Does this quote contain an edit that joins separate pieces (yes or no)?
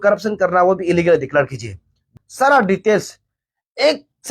yes